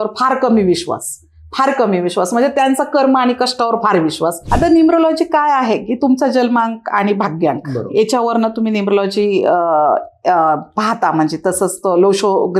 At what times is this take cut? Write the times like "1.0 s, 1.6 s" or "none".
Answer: 4.4 s

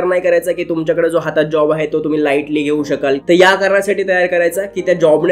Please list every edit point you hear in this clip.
3.2 s

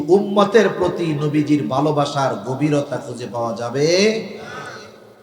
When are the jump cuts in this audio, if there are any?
none

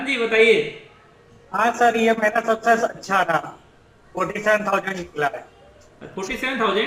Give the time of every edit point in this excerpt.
none

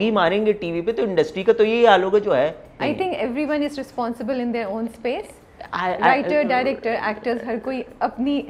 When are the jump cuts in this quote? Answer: none

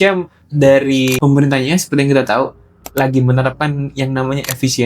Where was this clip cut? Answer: 1.2 s

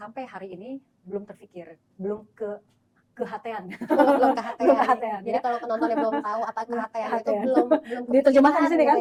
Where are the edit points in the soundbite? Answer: none

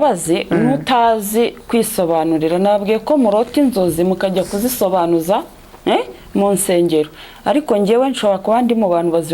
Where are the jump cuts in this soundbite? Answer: none

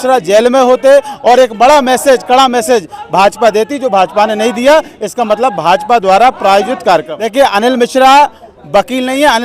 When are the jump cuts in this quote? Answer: 7.2 s

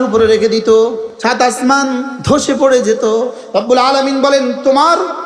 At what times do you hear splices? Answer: 1.1 s, 2.1 s, 3.4 s

